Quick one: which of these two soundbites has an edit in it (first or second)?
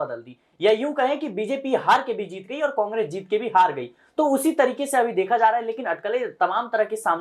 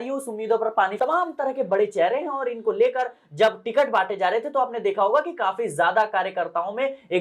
second